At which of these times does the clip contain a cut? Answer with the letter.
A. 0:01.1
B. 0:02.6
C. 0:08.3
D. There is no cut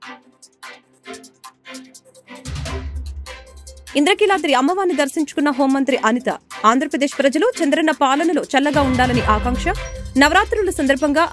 D